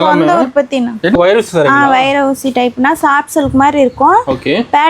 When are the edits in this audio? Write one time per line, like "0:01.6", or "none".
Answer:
0:01.2